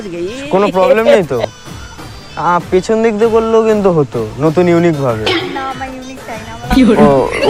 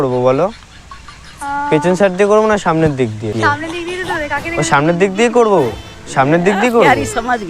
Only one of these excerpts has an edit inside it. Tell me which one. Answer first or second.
second